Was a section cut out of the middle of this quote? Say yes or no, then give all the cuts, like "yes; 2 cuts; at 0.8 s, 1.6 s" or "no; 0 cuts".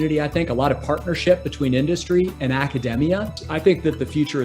yes; 1 cut; at 3.4 s